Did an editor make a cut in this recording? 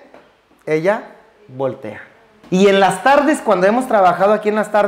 yes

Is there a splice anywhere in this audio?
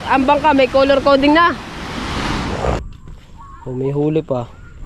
yes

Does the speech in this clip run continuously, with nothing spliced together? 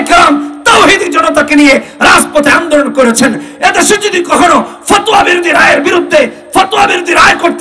yes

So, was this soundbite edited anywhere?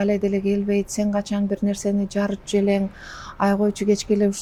no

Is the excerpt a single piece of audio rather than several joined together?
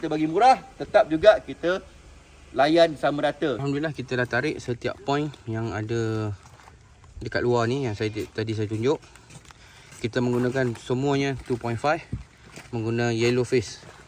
no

